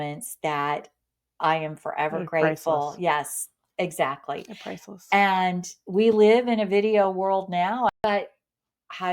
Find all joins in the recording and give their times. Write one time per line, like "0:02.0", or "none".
0:07.9